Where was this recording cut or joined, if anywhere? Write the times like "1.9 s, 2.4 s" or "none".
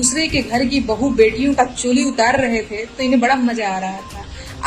none